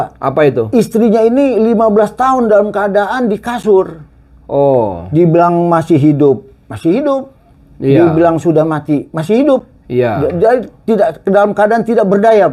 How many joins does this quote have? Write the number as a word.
zero